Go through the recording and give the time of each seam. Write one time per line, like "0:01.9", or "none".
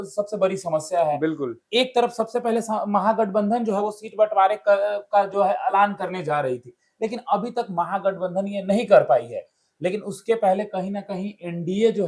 none